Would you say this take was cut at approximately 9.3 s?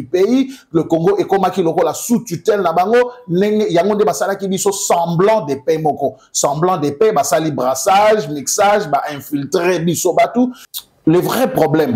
no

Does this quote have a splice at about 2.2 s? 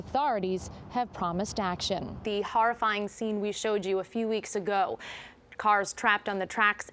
yes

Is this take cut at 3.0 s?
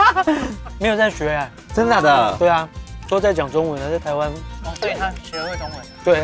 yes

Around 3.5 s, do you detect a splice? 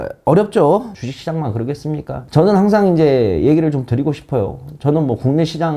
no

